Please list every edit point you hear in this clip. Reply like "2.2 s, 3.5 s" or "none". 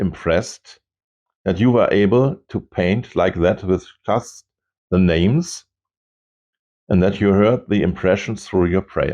none